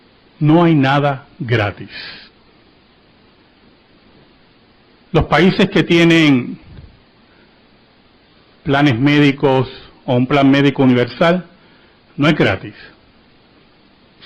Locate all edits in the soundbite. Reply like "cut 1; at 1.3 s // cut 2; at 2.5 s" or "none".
none